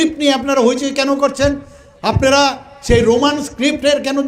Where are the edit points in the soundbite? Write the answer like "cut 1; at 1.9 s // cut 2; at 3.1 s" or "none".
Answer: none